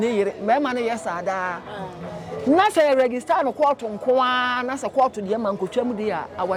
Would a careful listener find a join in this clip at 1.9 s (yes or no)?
no